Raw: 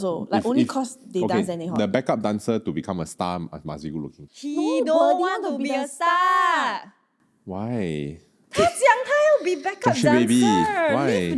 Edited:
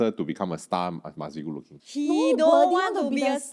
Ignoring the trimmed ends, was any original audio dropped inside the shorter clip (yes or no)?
no